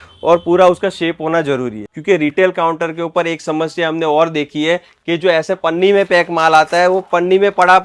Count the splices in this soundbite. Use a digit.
1